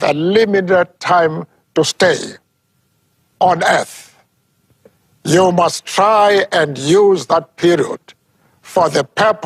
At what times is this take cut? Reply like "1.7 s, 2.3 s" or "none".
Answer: none